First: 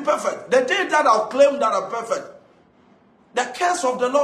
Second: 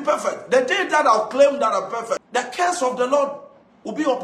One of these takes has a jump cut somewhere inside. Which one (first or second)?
second